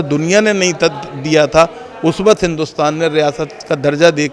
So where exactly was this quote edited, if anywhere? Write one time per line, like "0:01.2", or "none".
none

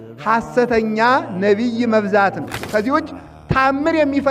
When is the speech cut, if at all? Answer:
0:02.6

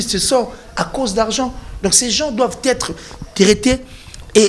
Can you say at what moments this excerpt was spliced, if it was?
none

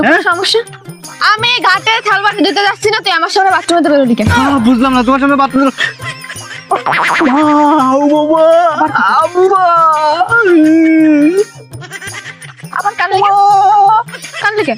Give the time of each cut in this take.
none

